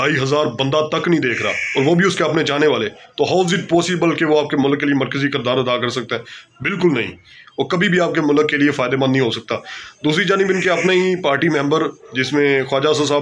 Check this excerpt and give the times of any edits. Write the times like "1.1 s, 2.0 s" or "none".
none